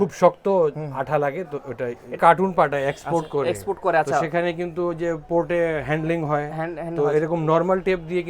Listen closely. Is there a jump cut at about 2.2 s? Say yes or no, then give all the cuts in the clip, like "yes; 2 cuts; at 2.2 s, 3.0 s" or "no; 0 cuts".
yes; 1 cut; at 2.2 s